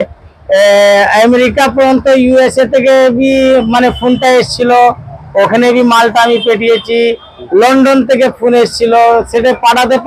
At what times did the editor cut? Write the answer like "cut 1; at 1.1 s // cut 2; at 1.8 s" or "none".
none